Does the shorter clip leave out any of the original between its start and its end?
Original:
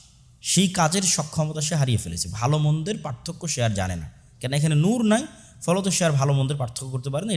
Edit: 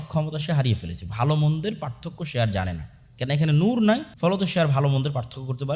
yes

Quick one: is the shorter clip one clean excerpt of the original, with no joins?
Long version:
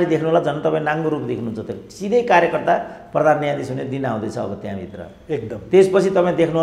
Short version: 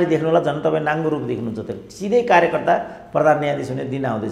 yes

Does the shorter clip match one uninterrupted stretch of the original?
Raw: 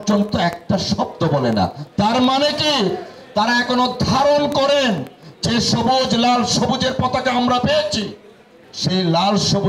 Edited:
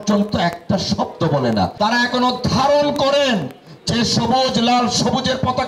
no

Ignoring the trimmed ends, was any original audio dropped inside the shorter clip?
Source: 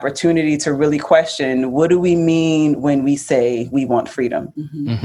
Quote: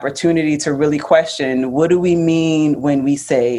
no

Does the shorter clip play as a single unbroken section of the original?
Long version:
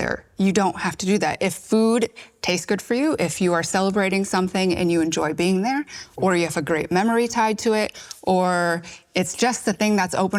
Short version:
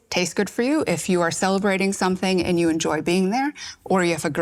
yes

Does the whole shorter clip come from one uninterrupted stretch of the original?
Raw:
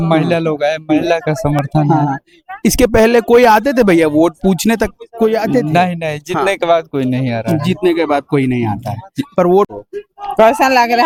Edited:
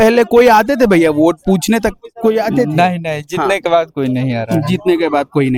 yes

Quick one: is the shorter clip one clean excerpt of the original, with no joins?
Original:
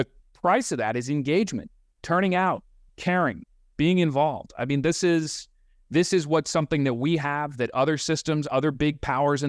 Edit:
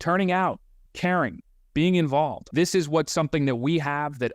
no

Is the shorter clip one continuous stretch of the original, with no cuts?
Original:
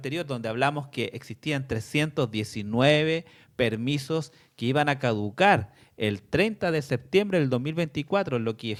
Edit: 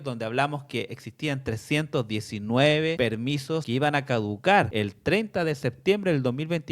no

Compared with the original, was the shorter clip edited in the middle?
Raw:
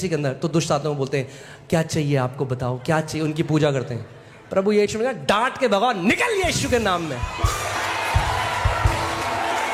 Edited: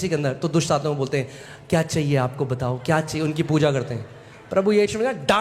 no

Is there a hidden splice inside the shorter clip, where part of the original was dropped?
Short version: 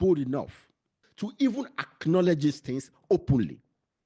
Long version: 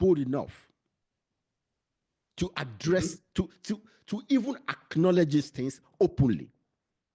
yes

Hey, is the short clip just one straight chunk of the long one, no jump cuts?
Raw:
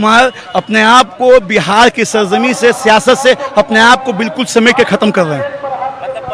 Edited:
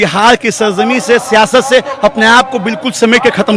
yes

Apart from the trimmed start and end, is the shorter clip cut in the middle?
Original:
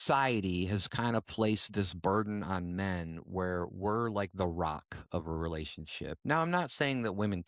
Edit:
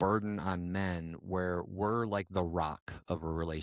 no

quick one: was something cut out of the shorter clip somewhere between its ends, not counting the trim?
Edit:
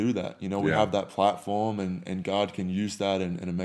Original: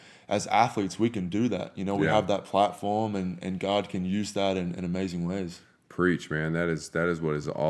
no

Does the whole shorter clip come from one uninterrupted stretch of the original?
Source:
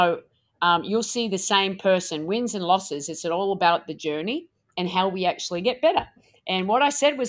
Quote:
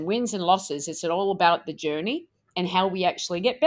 yes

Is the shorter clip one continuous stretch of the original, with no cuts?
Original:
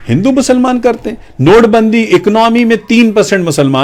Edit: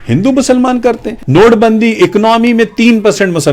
no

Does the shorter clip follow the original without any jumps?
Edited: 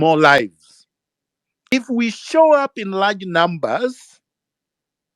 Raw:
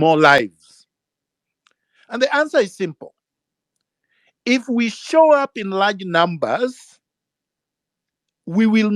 no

